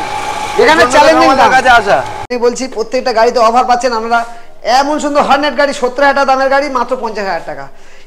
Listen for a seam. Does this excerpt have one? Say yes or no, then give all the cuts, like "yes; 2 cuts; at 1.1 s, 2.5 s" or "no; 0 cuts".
yes; 1 cut; at 2.3 s